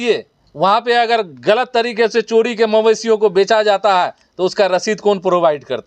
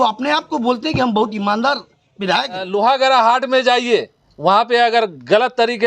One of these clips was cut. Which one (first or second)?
second